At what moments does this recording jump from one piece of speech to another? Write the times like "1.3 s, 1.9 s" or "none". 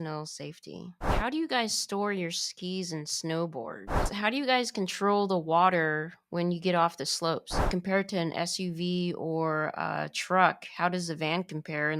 1.1 s, 4.1 s, 7.7 s